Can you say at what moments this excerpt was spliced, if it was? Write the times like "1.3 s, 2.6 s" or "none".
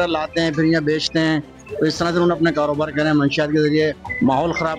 none